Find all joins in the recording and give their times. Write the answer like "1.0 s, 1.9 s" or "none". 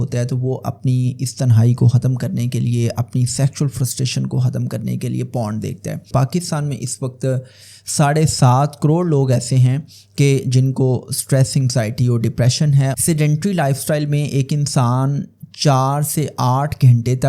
6.1 s, 13.0 s